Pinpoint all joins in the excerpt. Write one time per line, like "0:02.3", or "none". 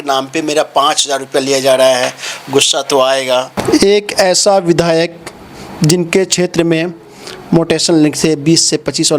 0:03.5